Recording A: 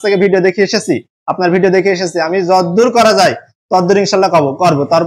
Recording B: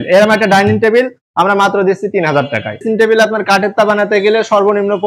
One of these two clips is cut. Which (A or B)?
B